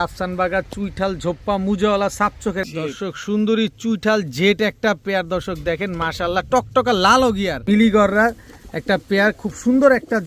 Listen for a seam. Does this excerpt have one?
yes; 2 cuts; at 2.6 s, 7.6 s

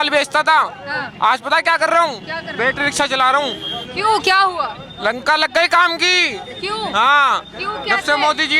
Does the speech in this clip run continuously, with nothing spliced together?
yes; 0 cuts

